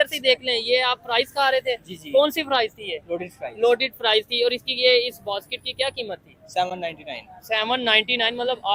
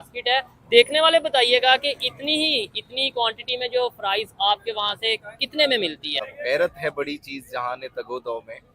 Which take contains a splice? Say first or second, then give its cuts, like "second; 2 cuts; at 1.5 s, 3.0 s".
second; 1 cut; at 6.3 s